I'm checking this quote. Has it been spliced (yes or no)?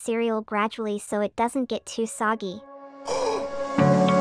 no